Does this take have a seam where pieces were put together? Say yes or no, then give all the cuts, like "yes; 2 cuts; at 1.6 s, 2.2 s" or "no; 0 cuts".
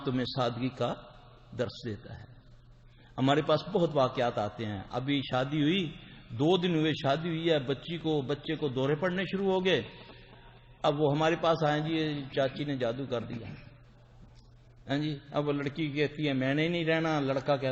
no; 0 cuts